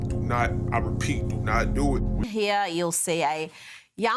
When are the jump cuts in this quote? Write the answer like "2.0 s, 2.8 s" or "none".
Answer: 2.3 s

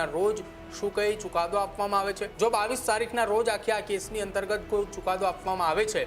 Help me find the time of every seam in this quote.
2.3 s

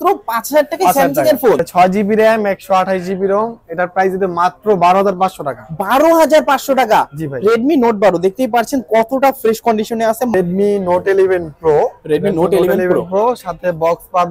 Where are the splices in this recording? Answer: 1.7 s, 10.3 s

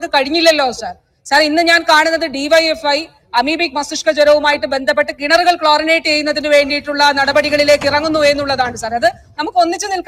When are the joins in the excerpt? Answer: none

